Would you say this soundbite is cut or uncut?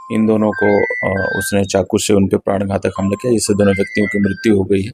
uncut